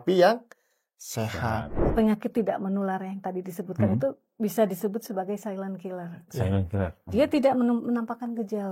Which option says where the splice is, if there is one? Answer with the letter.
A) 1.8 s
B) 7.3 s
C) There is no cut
A